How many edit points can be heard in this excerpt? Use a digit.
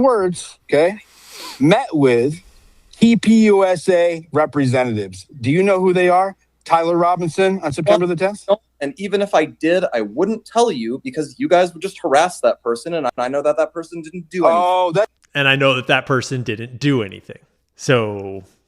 1